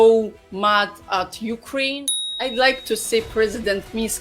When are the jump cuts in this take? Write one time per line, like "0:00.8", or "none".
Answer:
0:02.0

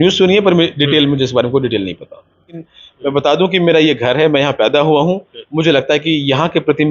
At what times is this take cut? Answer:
0:02.6

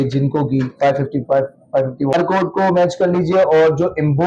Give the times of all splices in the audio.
0:02.1

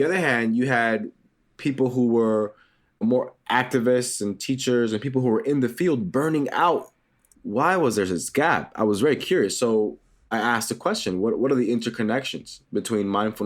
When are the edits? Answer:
0:07.2
0:10.3

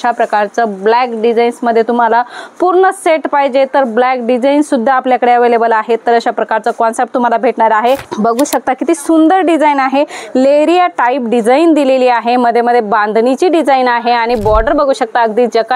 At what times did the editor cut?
0:08.1

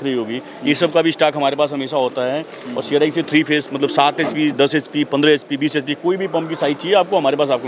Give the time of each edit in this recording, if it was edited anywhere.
none

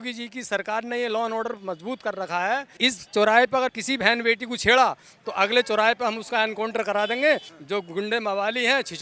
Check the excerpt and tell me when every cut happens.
0:02.7
0:03.7
0:07.5

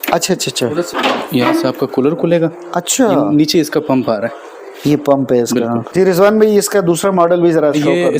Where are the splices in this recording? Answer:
0:05.9

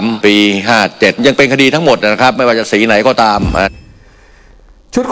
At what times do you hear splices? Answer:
0:03.7

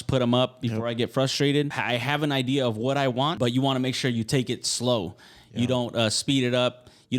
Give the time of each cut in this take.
0:01.8
0:03.3

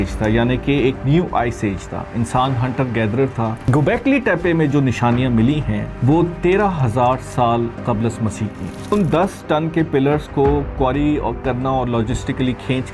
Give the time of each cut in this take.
0:03.6
0:08.9

